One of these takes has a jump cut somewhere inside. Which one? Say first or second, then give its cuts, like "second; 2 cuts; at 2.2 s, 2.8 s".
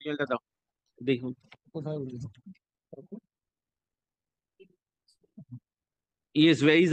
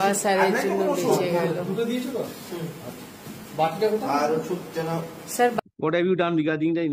second; 1 cut; at 5.6 s